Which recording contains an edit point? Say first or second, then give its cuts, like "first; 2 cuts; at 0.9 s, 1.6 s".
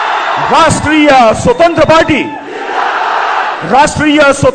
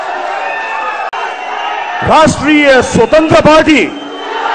second; 1 cut; at 1.1 s